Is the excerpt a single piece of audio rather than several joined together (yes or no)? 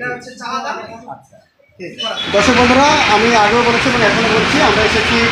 no